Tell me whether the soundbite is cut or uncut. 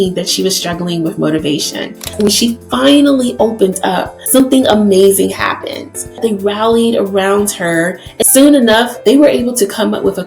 cut